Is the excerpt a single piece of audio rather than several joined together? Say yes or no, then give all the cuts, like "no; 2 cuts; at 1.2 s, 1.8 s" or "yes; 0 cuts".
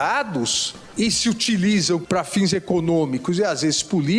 no; 2 cuts; at 0.9 s, 2.0 s